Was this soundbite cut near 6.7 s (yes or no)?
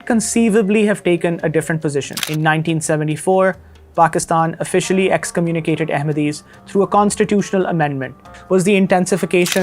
no